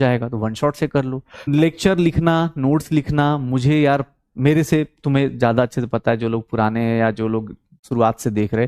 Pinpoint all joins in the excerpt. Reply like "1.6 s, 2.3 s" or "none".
1.5 s